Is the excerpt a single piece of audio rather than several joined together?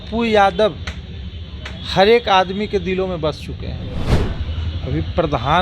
no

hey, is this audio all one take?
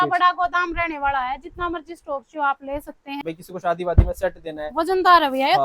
no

